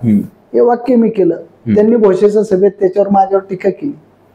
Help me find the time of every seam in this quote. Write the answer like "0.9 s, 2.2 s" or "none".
none